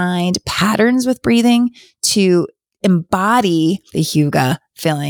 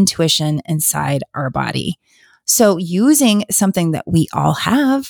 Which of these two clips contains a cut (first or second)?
first